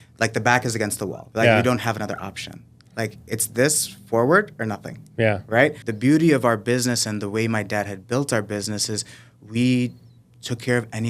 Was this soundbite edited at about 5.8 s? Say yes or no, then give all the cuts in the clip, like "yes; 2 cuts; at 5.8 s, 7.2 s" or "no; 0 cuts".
yes; 2 cuts; at 1.2 s, 5.8 s